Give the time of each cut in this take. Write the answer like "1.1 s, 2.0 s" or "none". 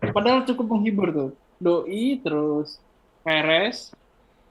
none